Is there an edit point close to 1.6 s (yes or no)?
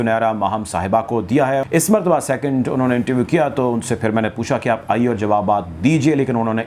yes